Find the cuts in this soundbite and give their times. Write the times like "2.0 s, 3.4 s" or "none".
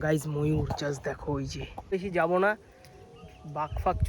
1.9 s